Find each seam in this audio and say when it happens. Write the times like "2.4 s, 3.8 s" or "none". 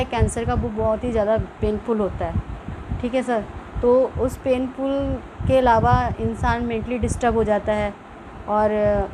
none